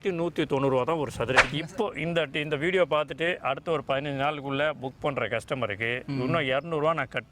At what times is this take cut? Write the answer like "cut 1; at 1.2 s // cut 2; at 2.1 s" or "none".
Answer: cut 1; at 1.5 s